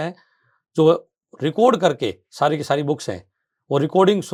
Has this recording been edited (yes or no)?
no